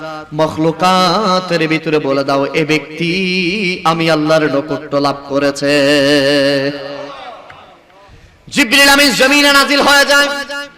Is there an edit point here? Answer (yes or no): no